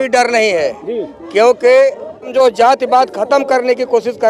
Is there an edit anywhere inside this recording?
yes; 1 cut; at 2.3 s

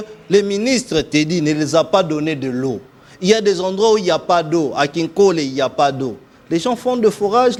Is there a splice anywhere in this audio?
no; 0 cuts

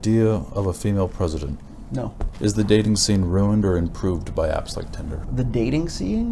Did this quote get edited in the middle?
yes; 2 cuts; at 2.2 s, 5.3 s

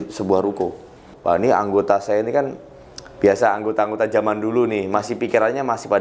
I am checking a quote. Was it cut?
yes; 1 cut; at 1.1 s

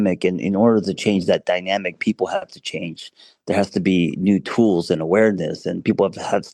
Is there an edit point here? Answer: no; 0 cuts

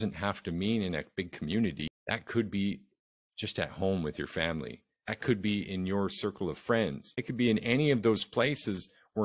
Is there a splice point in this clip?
yes; 2 cuts; at 1.8 s, 7.1 s

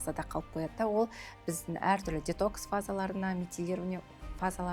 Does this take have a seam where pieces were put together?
no; 0 cuts

